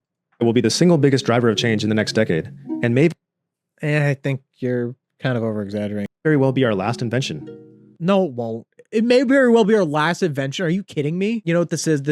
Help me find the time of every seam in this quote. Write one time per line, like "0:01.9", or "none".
0:06.1